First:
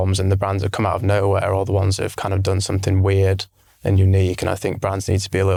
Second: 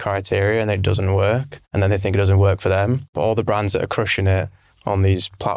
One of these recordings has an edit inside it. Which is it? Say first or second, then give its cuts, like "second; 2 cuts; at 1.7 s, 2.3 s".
second; 2 cuts; at 1.6 s, 3.1 s